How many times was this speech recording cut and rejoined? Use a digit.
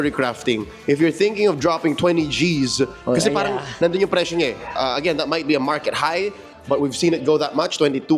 0